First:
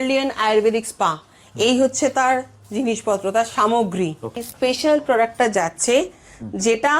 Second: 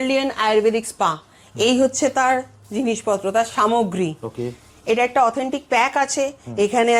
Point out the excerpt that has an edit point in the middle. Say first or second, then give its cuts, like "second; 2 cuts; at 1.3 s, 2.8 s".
first; 1 cut; at 4.5 s